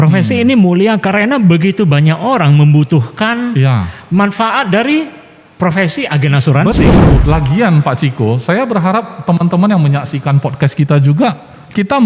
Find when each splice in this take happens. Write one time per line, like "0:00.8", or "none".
0:07.2